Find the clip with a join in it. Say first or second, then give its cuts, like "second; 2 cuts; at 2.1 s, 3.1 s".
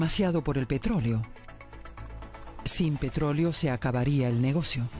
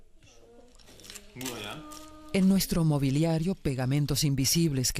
first; 1 cut; at 3.1 s